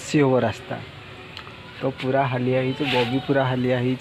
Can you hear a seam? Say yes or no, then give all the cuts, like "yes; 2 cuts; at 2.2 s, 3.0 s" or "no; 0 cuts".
no; 0 cuts